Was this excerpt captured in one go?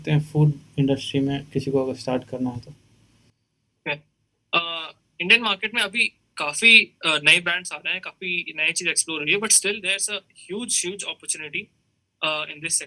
yes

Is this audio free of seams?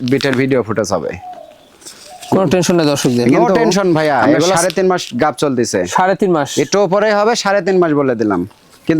no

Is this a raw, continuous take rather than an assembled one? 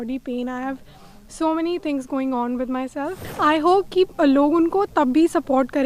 no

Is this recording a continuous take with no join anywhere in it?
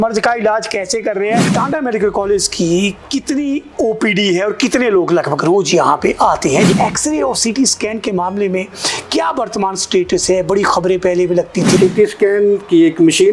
no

